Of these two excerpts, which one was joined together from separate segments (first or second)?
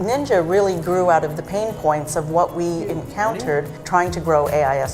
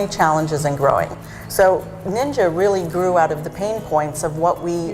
second